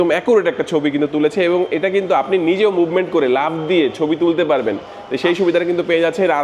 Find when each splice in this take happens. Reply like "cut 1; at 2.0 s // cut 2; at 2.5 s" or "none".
none